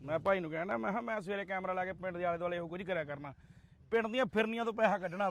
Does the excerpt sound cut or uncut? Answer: uncut